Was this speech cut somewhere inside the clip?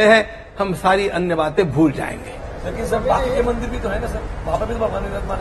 no; 0 cuts

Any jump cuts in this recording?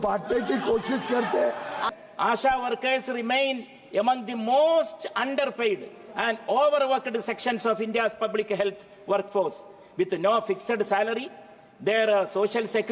yes; 1 cut; at 1.9 s

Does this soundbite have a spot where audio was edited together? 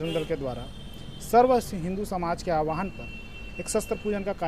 no; 0 cuts

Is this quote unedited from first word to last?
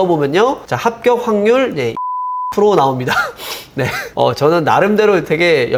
yes; 0 cuts

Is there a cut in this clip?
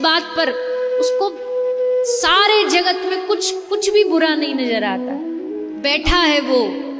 yes; 1 cut; at 5.6 s

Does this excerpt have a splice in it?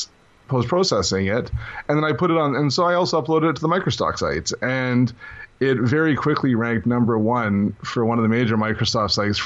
yes; 1 cut; at 1.7 s

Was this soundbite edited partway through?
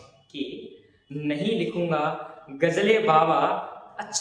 no; 0 cuts

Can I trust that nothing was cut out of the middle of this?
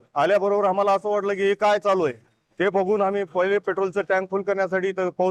yes; 0 cuts

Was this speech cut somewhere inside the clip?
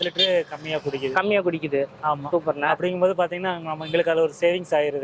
no; 0 cuts

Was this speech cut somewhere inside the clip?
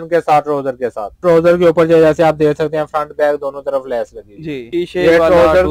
yes; 2 cuts; at 1.1 s, 4.6 s

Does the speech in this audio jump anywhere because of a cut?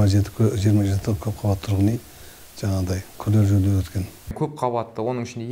yes; 1 cut; at 4.3 s

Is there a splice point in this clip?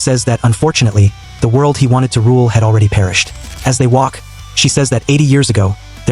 no; 0 cuts

